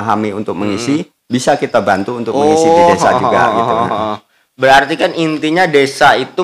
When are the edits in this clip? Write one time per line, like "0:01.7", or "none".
none